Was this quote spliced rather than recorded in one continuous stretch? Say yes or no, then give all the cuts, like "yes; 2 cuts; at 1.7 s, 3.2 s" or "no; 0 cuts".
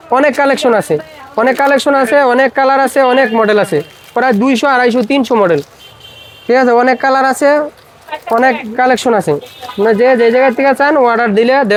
no; 0 cuts